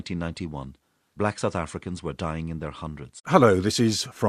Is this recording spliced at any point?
no; 0 cuts

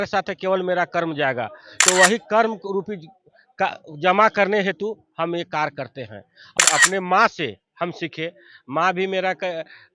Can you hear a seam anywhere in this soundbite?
yes; 1 cut; at 6.6 s

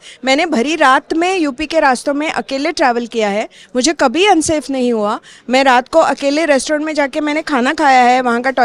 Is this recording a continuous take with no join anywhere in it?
yes; 0 cuts

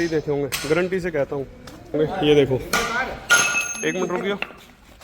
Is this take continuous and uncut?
no; 1 cut; at 1.9 s

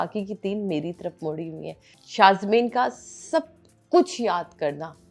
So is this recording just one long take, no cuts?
no; 1 cut; at 2.0 s

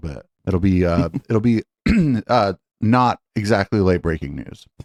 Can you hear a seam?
no; 0 cuts

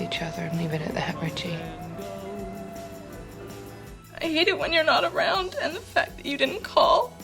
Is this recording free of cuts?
no; 1 cut; at 3.8 s

